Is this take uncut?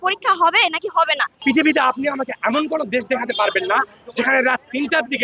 no; 1 cut; at 1.3 s

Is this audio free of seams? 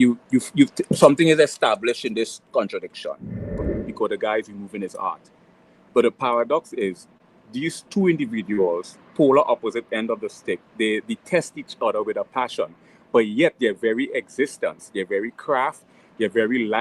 no; 1 cut; at 3.7 s

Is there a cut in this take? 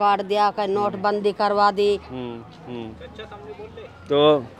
no; 0 cuts

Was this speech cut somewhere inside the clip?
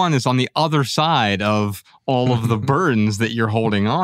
no; 0 cuts

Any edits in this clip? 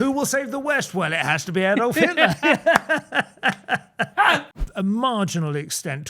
yes; 1 cut; at 4.6 s

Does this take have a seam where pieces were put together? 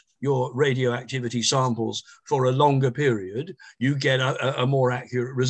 no; 0 cuts

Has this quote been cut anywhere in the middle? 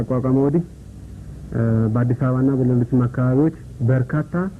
no; 0 cuts

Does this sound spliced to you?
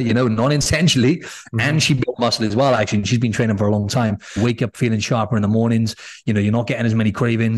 yes; 1 cut; at 4.4 s

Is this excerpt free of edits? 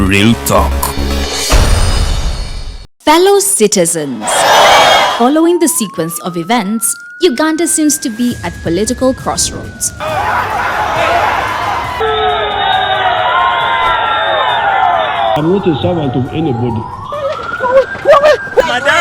no; 1 cut; at 2.9 s

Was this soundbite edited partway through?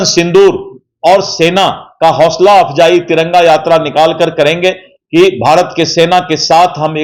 no; 0 cuts

